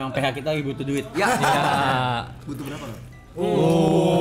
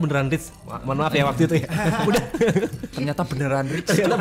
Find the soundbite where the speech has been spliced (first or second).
second